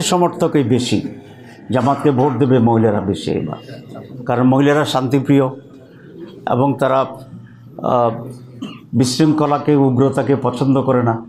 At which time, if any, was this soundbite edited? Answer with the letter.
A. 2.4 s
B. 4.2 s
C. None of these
C